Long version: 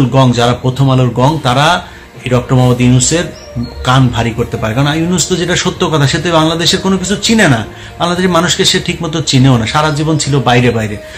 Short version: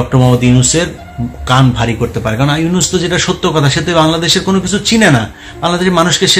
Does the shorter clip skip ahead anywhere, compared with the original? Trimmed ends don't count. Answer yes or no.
no